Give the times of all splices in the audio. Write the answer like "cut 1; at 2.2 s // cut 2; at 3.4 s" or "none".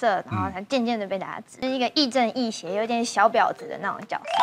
cut 1; at 1.4 s